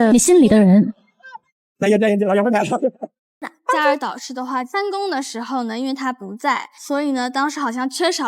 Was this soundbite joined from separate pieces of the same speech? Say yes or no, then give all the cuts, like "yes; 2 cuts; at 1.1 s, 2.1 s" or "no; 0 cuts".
yes; 1 cut; at 3.5 s